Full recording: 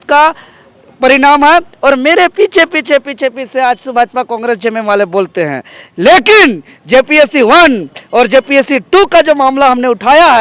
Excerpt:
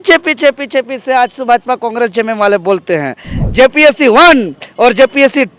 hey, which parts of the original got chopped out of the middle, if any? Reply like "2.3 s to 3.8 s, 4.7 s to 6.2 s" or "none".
5.8 s to 6.7 s